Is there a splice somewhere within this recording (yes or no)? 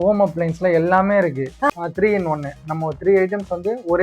yes